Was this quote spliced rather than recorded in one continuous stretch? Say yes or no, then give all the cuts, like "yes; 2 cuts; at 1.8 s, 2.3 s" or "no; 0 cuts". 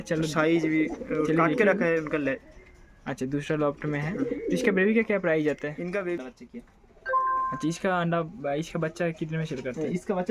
yes; 1 cut; at 6.2 s